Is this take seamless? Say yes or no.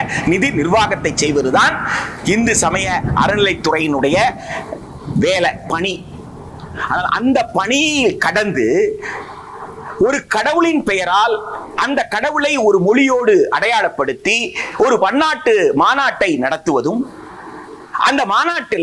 yes